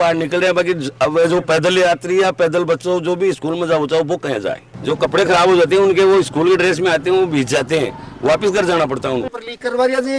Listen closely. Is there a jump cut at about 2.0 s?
no; 2 cuts; at 4.7 s, 9.3 s

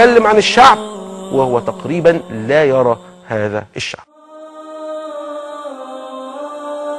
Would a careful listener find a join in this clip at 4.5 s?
yes; 1 cut; at 4.5 s

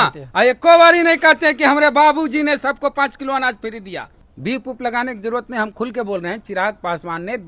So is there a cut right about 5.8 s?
no; 1 cut; at 4.2 s

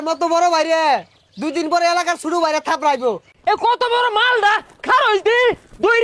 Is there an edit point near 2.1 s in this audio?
no; 1 cut; at 3.3 s

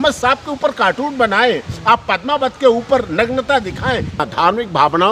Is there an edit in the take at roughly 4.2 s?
yes; 1 cut; at 4.2 s

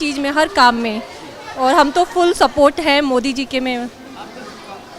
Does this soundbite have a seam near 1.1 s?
no; 0 cuts

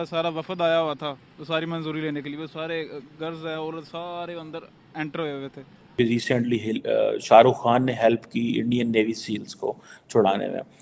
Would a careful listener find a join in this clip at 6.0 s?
yes; 1 cut; at 6.0 s

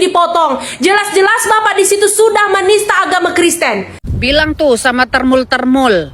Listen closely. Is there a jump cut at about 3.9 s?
yes; 1 cut; at 3.9 s

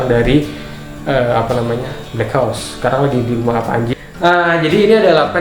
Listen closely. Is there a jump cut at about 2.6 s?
no; 1 cut; at 3.9 s

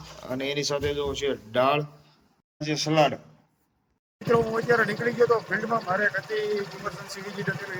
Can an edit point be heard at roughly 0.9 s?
no; 0 cuts

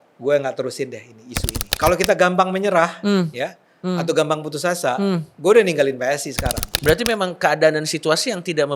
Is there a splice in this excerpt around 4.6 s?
no; 2 cuts; at 1.6 s, 6.7 s

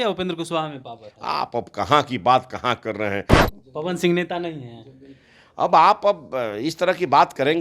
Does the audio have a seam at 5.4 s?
no; 1 cut; at 3.4 s

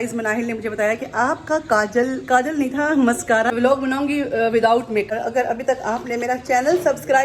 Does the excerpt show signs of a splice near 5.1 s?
yes; 2 cuts; at 3.5 s, 5.1 s

